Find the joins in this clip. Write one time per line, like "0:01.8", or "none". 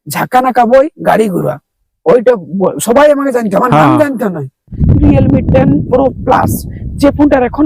0:04.7